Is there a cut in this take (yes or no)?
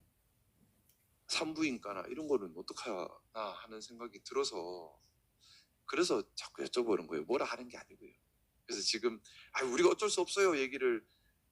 no